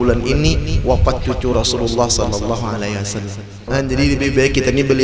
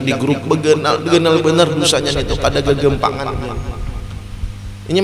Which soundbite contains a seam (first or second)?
first